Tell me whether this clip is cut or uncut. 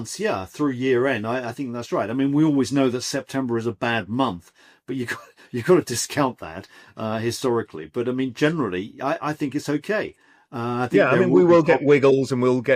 uncut